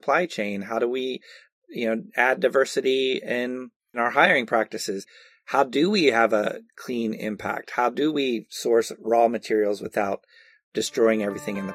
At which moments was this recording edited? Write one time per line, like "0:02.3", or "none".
0:04.0
0:06.7